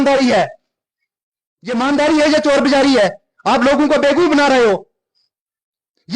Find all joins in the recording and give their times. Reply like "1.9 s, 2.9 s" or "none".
none